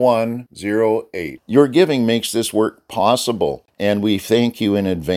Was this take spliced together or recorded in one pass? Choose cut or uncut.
cut